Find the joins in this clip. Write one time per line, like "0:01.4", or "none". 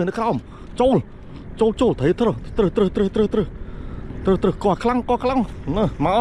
none